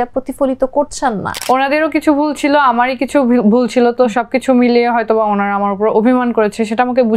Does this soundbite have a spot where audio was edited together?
yes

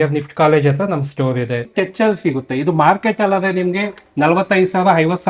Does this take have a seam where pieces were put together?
yes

